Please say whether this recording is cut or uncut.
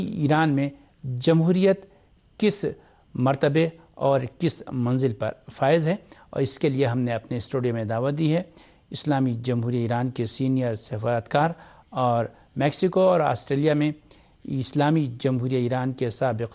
uncut